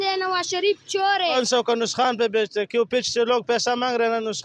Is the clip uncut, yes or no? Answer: no